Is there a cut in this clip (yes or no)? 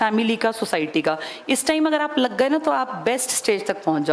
no